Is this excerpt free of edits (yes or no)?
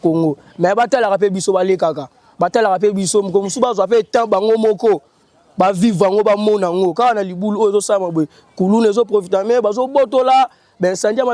yes